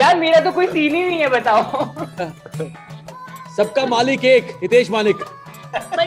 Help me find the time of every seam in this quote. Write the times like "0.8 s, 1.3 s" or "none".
none